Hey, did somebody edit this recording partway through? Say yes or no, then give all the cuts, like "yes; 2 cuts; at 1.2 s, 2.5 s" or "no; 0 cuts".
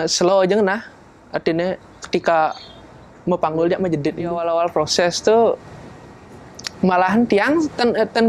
yes; 1 cut; at 4.4 s